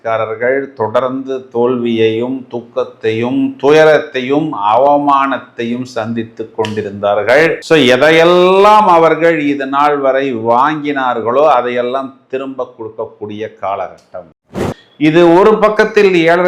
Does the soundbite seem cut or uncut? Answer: cut